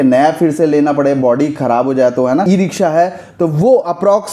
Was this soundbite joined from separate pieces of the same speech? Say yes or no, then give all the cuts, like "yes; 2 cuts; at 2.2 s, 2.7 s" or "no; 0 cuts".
yes; 1 cut; at 2.4 s